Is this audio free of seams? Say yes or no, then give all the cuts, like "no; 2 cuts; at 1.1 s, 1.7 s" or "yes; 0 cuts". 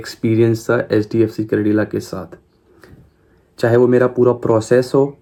yes; 0 cuts